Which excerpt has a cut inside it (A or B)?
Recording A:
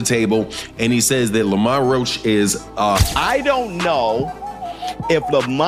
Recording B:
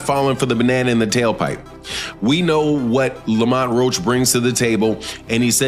A